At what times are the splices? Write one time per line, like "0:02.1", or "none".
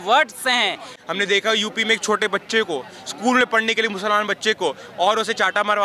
0:00.9